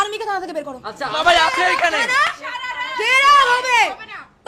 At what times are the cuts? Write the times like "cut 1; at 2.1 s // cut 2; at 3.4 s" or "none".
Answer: cut 1; at 1.2 s

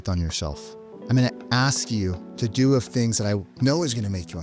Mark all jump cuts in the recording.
cut 1; at 2.2 s // cut 2; at 3.5 s

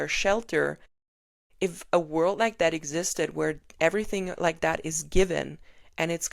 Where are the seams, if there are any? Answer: none

